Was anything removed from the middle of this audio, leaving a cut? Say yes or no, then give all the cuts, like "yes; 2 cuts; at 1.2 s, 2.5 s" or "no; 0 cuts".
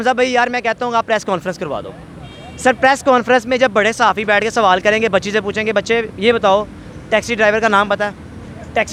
no; 0 cuts